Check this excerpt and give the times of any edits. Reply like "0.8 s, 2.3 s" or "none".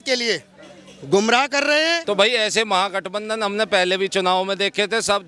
2.0 s